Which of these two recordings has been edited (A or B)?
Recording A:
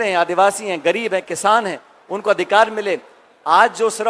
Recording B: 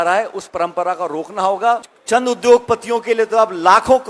B